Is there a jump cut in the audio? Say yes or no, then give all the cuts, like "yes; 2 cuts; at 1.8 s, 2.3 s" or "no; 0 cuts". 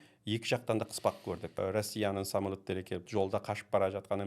yes; 2 cuts; at 1.5 s, 3.1 s